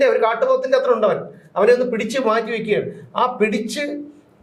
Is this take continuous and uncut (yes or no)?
yes